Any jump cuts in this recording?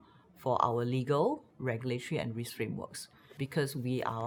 no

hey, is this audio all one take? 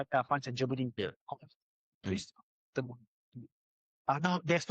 no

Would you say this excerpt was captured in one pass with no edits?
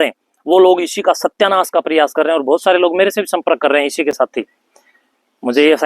yes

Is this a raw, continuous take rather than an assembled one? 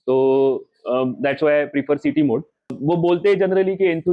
no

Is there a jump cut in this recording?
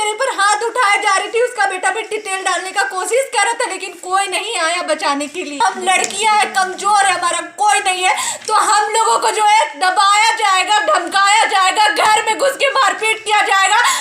yes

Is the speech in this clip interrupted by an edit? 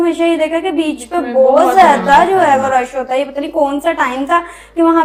no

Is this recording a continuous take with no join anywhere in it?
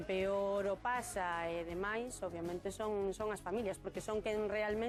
yes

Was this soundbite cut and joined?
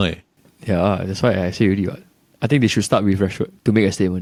no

